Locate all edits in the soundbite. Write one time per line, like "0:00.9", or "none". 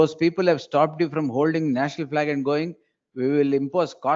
none